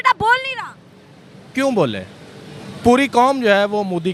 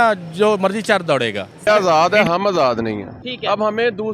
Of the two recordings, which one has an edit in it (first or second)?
second